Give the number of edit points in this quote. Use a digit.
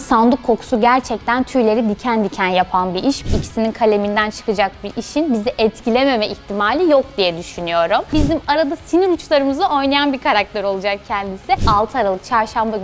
3